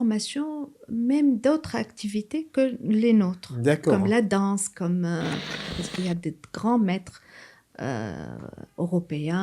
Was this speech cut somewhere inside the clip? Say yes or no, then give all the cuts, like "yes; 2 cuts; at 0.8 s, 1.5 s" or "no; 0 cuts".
yes; 1 cut; at 5.8 s